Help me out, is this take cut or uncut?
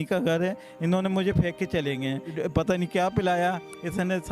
cut